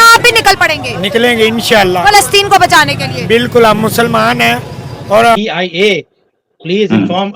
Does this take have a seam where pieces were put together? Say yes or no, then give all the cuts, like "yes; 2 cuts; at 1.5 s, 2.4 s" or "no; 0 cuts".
yes; 1 cut; at 5.4 s